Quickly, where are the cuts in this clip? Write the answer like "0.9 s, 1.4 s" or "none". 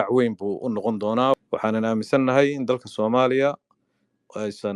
1.3 s